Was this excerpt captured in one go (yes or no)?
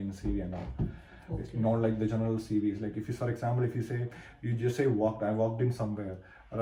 yes